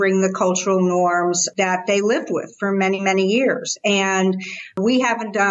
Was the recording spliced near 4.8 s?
yes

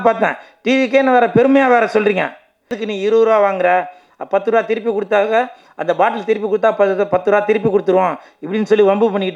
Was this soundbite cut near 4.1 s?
no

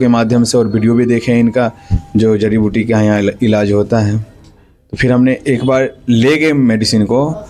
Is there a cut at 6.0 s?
no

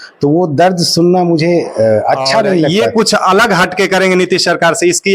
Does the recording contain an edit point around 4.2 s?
no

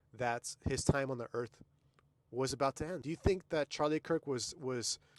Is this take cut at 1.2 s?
no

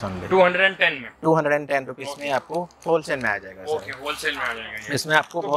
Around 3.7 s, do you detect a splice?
no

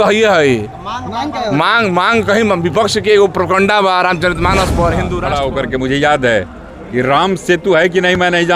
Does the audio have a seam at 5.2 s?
yes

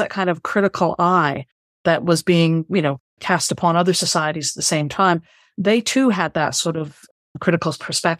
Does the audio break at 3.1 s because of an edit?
no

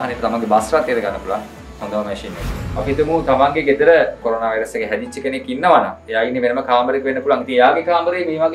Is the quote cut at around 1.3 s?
no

